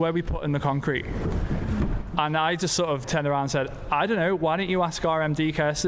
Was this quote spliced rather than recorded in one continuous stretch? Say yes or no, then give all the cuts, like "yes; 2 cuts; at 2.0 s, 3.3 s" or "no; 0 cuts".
no; 0 cuts